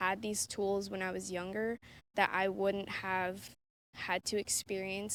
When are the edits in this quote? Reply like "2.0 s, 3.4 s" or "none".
none